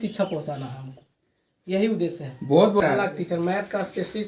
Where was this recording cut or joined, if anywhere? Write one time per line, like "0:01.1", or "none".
0:02.8